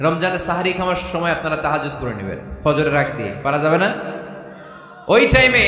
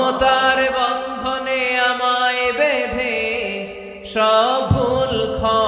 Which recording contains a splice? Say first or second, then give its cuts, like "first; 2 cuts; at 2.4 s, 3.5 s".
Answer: first; 1 cut; at 1.0 s